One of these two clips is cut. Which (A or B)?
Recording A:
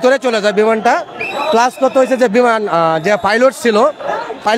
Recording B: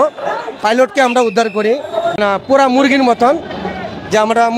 B